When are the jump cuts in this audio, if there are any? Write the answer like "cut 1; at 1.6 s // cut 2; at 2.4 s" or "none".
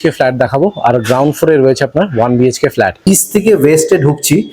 cut 1; at 3.0 s